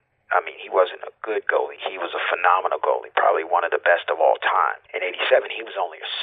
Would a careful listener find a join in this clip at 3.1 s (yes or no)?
no